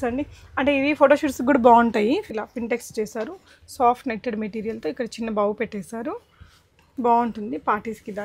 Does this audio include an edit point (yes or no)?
yes